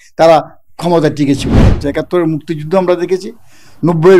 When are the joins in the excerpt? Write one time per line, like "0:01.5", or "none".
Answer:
0:01.8